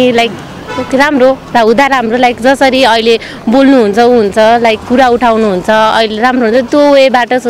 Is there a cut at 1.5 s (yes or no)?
no